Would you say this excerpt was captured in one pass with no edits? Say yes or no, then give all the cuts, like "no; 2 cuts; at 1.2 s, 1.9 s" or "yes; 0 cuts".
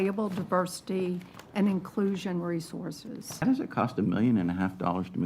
no; 1 cut; at 3.4 s